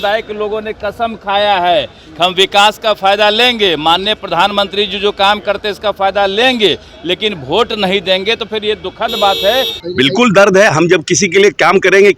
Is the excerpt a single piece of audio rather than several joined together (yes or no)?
no